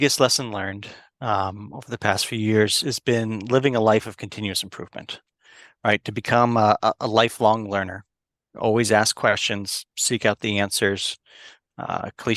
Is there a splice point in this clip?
no; 0 cuts

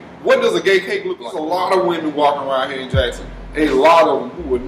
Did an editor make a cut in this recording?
yes; 1 cut; at 1.1 s

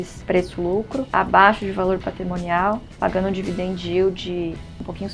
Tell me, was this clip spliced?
no; 0 cuts

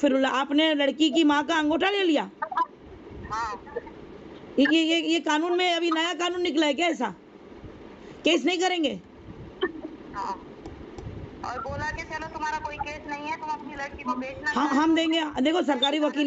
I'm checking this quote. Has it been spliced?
no; 0 cuts

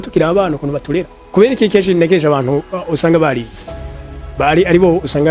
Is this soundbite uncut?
no; 1 cut; at 1.3 s

